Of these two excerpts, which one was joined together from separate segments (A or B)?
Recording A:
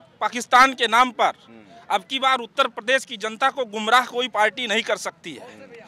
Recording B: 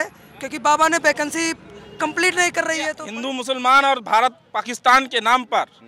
B